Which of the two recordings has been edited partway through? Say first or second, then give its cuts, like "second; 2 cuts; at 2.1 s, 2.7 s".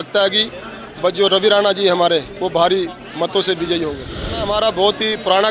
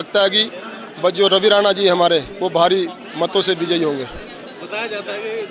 first; 1 cut; at 4.4 s